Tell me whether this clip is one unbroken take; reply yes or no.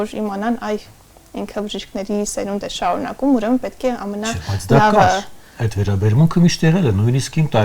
yes